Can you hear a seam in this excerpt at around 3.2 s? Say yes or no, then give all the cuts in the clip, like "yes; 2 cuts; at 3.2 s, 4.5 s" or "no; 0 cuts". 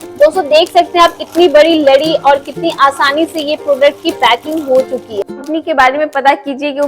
no; 1 cut; at 5.2 s